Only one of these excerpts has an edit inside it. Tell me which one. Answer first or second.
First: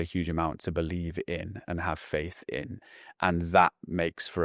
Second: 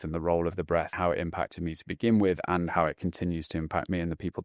second